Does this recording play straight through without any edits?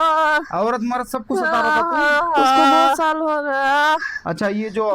no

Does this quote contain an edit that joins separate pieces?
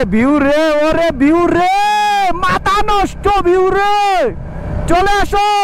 no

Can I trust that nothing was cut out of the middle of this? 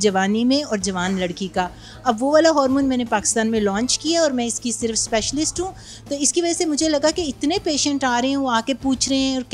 yes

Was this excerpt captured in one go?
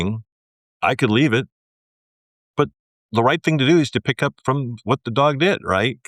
yes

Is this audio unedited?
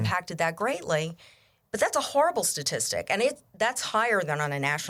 yes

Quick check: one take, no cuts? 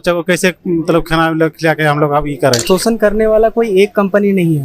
no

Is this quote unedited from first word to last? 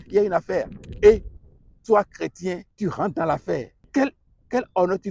no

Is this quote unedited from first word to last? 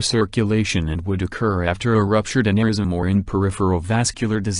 no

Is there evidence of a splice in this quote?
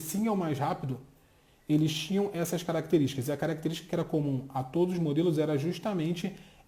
no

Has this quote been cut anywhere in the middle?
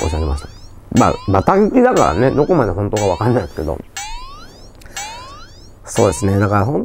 no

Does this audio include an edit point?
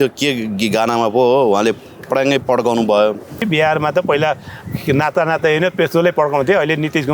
yes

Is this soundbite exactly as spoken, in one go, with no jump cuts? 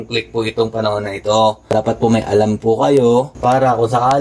no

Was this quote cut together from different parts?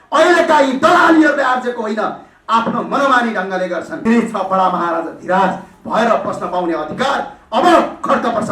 yes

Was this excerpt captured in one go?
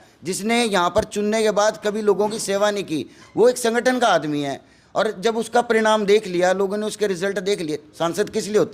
yes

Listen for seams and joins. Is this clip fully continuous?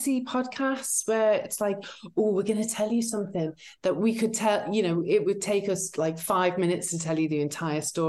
yes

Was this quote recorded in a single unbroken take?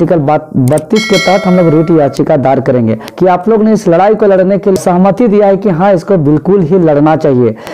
no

